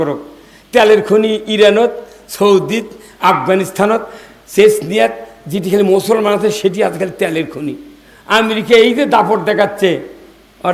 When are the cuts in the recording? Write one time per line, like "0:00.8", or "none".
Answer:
none